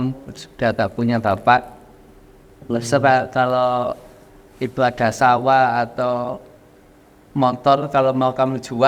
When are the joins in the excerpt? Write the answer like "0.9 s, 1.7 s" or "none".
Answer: none